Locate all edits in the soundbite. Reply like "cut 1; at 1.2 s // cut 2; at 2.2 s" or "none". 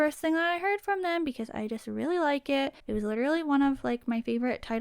cut 1; at 2.8 s